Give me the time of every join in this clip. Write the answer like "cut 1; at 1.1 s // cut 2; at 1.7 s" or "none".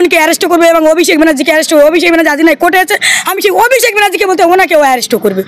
none